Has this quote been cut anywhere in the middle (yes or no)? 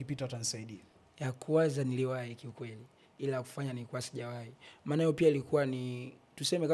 no